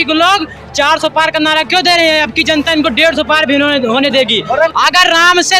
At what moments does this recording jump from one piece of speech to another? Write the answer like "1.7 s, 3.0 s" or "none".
4.7 s